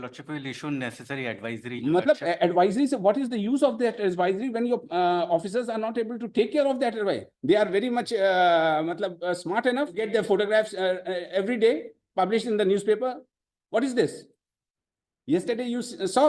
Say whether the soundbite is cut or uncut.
cut